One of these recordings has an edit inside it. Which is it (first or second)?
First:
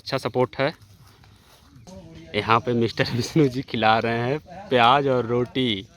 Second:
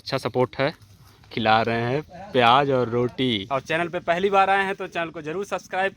second